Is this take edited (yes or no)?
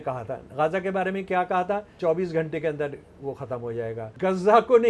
yes